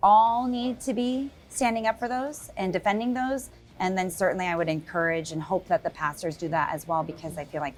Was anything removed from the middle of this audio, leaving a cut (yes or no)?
no